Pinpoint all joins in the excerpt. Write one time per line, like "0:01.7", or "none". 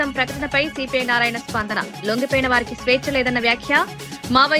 none